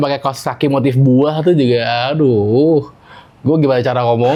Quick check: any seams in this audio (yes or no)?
no